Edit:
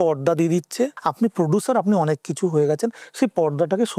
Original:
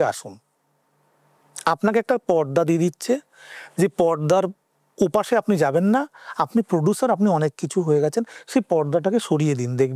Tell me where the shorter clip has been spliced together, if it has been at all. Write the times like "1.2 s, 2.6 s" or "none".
1.0 s